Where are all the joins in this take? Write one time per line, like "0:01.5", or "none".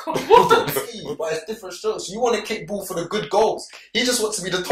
0:01.0